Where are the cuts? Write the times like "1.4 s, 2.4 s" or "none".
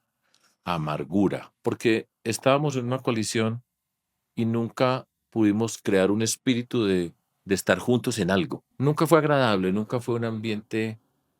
1.5 s, 8.7 s